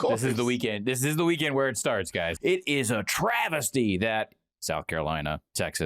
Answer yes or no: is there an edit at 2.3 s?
yes